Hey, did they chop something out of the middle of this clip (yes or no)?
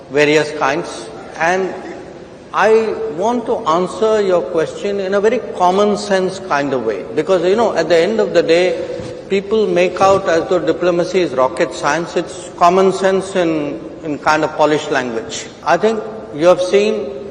yes